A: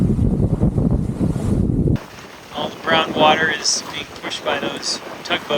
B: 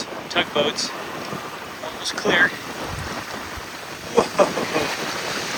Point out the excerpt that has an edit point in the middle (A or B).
A